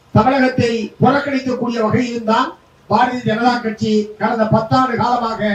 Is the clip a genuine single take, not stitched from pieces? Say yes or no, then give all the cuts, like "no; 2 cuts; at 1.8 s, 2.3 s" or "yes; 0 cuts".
yes; 0 cuts